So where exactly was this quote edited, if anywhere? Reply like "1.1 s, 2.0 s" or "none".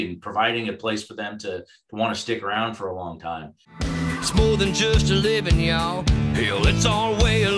3.9 s